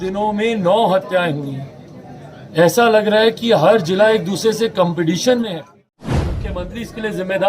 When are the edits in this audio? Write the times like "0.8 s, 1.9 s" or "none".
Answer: 6.3 s